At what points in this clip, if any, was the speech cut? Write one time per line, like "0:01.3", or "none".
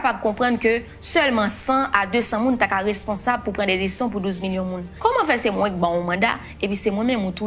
0:04.8